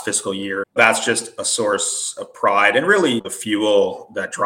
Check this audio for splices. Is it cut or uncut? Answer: cut